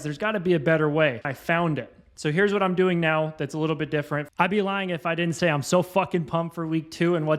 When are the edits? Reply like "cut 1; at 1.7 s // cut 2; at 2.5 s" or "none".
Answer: cut 1; at 1.3 s // cut 2; at 4.3 s